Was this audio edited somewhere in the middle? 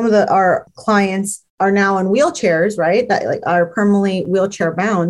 no; 0 cuts

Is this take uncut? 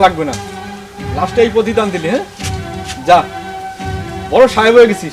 yes; 0 cuts

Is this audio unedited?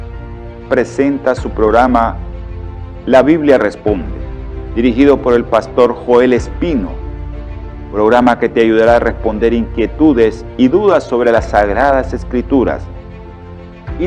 no; 1 cut; at 0.9 s

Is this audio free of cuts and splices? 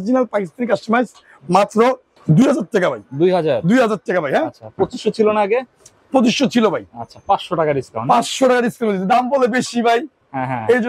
yes; 0 cuts

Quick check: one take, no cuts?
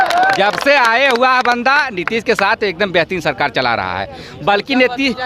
yes; 0 cuts

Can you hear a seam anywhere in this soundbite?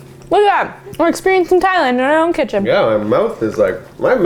no; 0 cuts

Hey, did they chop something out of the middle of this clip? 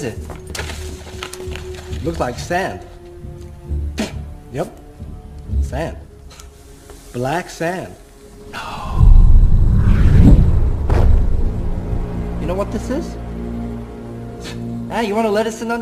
no; 0 cuts

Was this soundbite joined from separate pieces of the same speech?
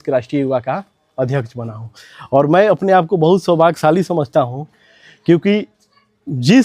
no; 0 cuts

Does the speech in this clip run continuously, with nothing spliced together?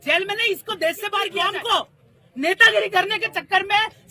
no; 1 cut; at 1.3 s

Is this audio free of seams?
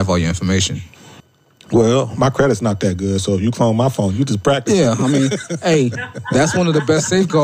no; 1 cut; at 1.1 s

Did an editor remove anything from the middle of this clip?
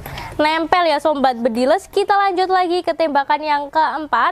no; 0 cuts

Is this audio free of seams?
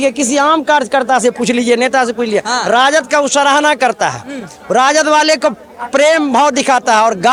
yes; 0 cuts

